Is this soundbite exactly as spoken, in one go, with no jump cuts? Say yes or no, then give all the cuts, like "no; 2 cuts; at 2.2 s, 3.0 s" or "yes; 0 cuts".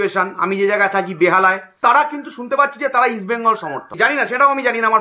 no; 2 cuts; at 1.8 s, 3.8 s